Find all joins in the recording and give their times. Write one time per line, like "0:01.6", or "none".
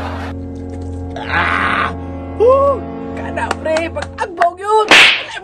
none